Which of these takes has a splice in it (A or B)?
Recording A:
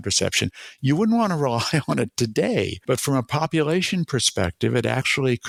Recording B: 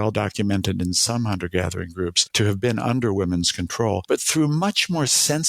B